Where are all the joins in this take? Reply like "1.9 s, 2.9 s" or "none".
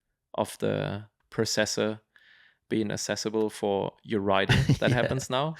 1.2 s